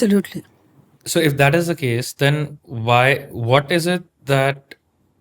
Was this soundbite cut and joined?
no; 0 cuts

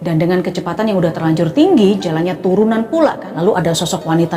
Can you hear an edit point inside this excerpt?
yes; 1 cut; at 3.2 s

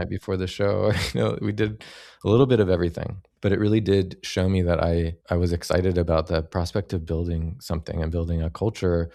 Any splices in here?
no; 0 cuts

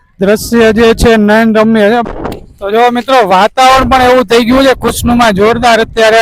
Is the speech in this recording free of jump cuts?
no; 1 cut; at 2.0 s

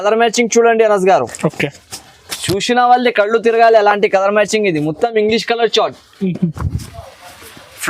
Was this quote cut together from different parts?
yes; 1 cut; at 6.6 s

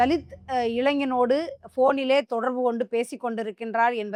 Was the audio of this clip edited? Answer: no; 0 cuts

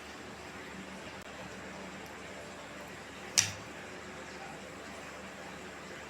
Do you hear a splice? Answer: yes; 1 cut; at 1.2 s

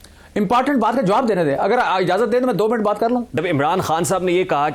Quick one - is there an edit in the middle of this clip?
yes; 1 cut; at 3.3 s

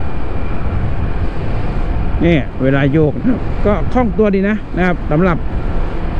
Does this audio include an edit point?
no; 0 cuts

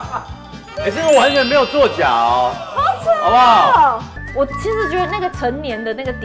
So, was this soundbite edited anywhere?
yes; 1 cut; at 4.2 s

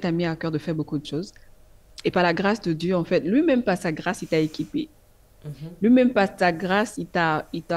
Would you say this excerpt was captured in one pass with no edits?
yes; 0 cuts

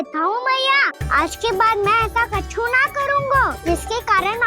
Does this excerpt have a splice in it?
yes; 2 cuts; at 1.0 s, 3.6 s

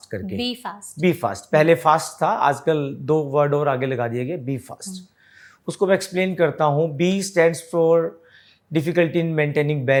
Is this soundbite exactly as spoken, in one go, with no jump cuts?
yes; 0 cuts

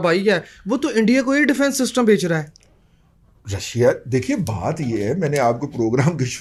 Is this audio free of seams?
yes; 0 cuts

